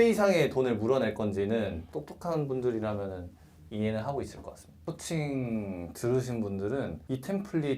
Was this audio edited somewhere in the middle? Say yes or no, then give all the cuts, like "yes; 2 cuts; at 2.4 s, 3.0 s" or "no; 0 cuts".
yes; 2 cuts; at 1.8 s, 4.8 s